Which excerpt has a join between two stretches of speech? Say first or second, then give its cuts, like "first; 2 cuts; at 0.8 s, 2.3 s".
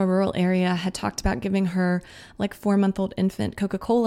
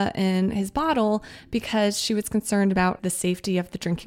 second; 1 cut; at 3.0 s